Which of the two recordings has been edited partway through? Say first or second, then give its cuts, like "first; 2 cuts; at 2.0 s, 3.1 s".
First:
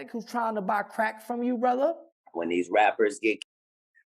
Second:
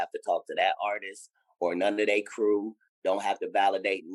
first; 1 cut; at 2.1 s